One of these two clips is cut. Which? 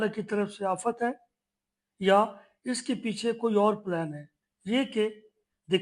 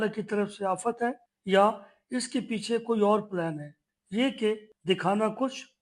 second; 2 cuts; at 1.3 s, 4.7 s

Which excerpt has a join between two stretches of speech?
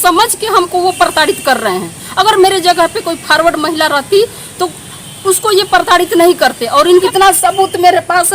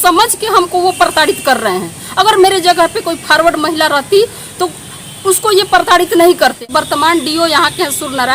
first; 1 cut; at 6.6 s

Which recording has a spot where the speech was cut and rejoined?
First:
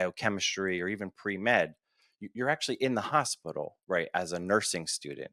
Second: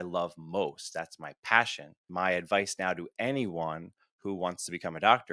second; 1 cut; at 2.0 s

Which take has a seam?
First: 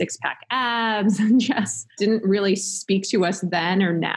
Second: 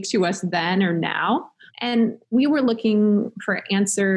first; 1 cut; at 2.0 s

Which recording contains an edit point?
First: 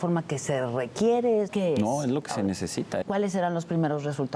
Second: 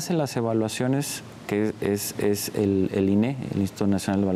first; 2 cuts; at 1.5 s, 3.0 s

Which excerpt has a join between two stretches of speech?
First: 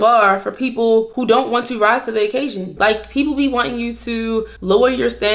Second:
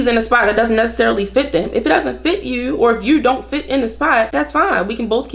first; 3 cuts; at 1.1 s, 2.7 s, 4.5 s

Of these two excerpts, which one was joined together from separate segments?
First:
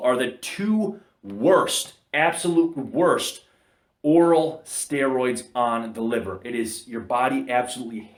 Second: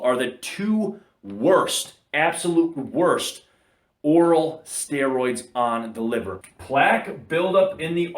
second; 1 cut; at 6.4 s

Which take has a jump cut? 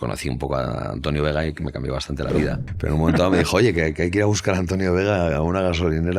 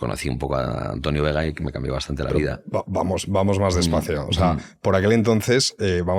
first; 1 cut; at 2.6 s

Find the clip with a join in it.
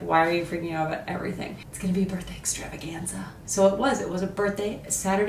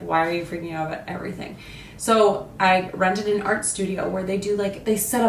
first; 1 cut; at 1.6 s

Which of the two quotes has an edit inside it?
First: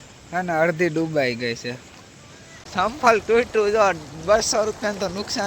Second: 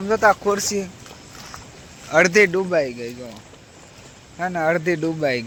first; 1 cut; at 2.7 s

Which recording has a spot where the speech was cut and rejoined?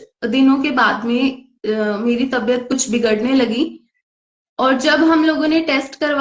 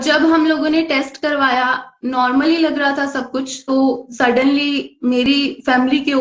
second; 1 cut; at 3.6 s

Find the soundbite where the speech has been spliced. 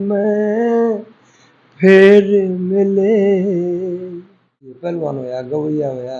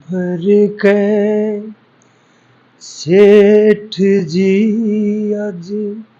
first; 1 cut; at 4.8 s

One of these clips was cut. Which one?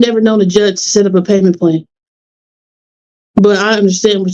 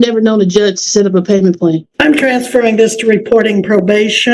second; 1 cut; at 1.9 s

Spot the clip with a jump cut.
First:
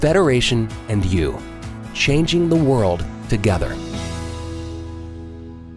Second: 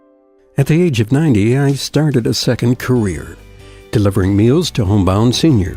first; 1 cut; at 3.7 s

